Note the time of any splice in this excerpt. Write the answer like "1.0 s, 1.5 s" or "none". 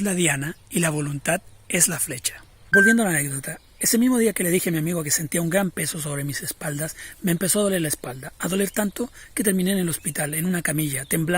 2.5 s